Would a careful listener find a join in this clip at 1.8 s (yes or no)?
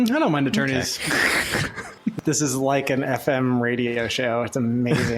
yes